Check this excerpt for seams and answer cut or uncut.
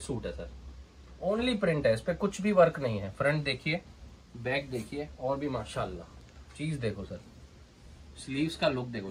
uncut